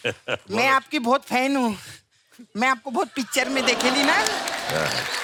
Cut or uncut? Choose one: uncut